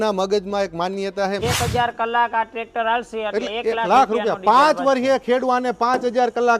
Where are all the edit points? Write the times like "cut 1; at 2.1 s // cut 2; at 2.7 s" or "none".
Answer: cut 1; at 1.4 s